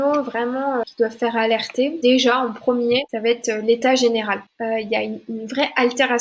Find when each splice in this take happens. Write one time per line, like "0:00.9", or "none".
0:00.8
0:02.0
0:03.1
0:04.5